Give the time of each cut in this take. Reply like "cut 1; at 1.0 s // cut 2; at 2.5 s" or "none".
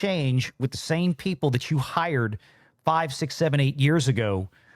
none